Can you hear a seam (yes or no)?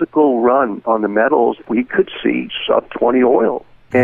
yes